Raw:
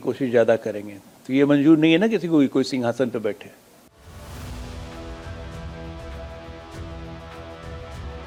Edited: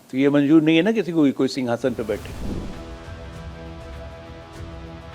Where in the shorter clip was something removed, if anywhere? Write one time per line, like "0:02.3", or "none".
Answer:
0:02.3